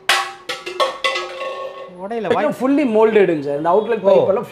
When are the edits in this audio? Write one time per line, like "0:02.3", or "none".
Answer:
0:02.4